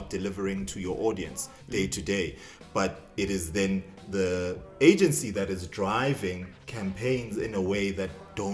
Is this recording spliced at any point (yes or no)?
no